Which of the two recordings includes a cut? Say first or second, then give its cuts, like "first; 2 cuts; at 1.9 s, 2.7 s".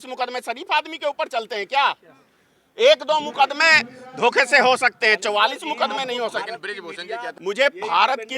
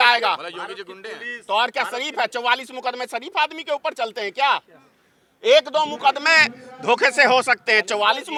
first; 1 cut; at 7.4 s